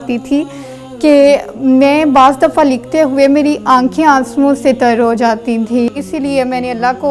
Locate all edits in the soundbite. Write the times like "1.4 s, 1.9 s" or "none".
5.9 s